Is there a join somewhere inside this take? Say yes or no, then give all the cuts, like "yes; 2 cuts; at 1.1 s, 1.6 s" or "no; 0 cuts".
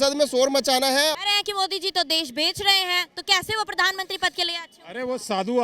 yes; 1 cut; at 1.1 s